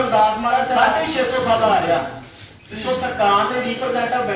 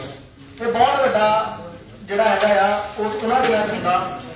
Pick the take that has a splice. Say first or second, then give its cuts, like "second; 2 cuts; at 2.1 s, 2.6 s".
first; 1 cut; at 0.9 s